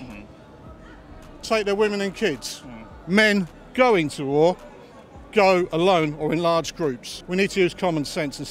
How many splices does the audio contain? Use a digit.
1